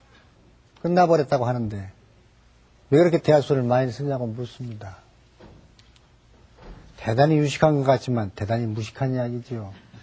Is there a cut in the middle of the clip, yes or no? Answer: no